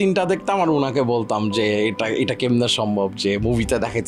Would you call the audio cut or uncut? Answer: uncut